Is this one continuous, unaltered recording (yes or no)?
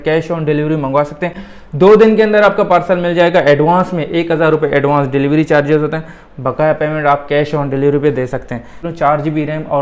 yes